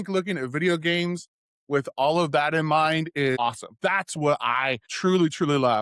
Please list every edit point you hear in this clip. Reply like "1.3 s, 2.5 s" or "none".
3.4 s, 4.9 s